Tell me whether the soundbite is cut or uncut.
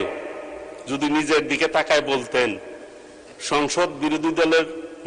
uncut